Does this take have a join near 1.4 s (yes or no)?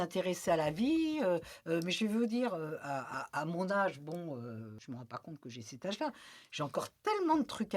no